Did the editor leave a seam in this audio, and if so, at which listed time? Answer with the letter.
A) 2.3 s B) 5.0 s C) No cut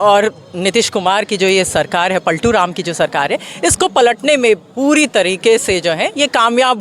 C